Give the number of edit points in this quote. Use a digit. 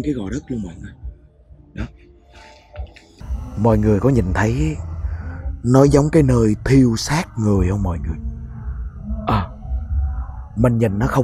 1